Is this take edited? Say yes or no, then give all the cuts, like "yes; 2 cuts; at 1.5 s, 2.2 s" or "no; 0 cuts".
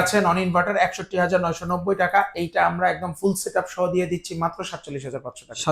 no; 0 cuts